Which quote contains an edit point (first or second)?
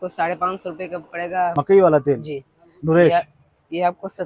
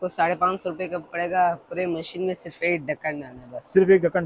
first